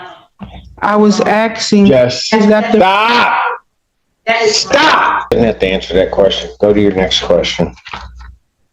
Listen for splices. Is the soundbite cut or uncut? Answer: cut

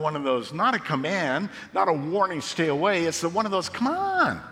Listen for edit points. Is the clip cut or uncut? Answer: uncut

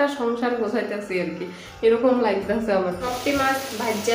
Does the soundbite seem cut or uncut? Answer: cut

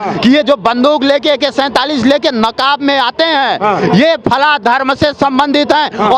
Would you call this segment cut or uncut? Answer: uncut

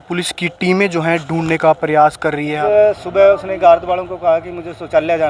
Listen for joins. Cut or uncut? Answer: cut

